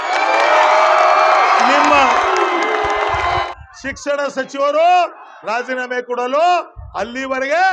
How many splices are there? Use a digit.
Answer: 1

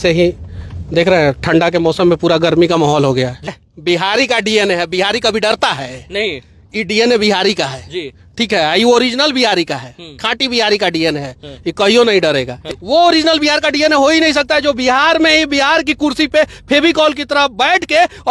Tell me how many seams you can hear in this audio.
2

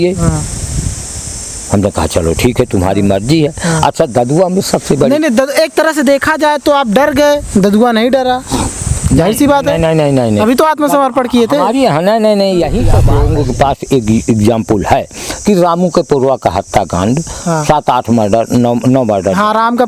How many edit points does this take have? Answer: 1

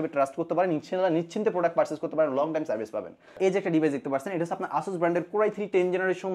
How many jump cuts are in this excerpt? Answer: 0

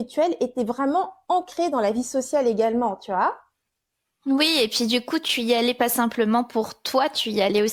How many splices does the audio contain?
0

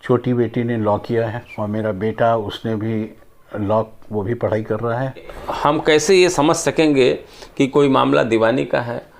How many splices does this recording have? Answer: 2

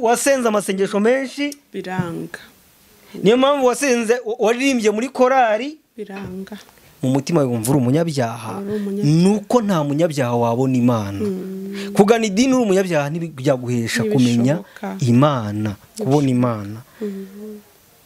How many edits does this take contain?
0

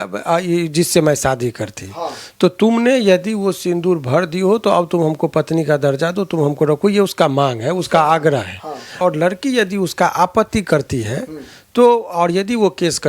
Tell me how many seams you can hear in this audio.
1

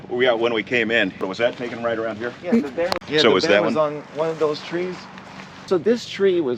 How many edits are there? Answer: 2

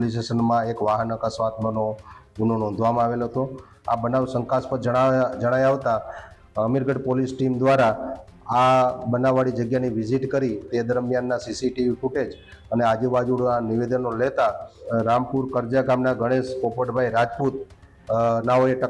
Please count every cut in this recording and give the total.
3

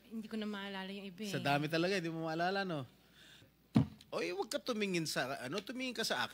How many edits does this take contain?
1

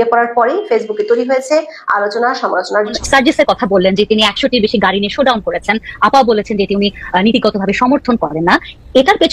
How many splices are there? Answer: 1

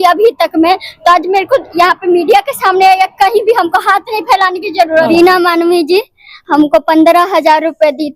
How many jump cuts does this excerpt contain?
1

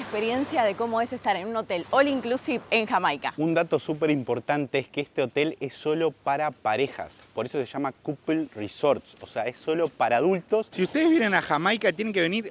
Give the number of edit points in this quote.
2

